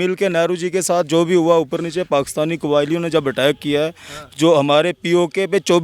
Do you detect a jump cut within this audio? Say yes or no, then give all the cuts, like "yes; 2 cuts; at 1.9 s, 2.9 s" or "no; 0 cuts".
no; 0 cuts